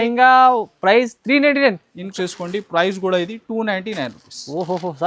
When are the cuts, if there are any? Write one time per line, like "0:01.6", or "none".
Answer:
0:02.1